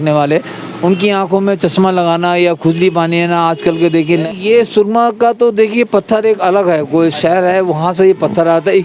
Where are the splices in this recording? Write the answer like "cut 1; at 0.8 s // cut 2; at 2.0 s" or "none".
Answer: cut 1; at 4.3 s